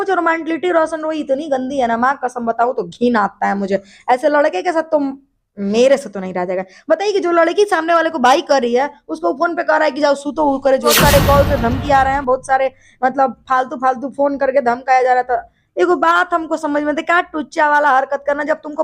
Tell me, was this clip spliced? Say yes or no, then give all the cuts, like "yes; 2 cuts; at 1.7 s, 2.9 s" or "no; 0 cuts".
yes; 1 cut; at 10.9 s